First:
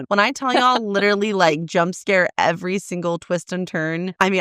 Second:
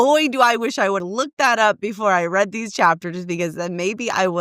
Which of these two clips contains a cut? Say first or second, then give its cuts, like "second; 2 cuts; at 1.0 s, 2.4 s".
second; 1 cut; at 1.0 s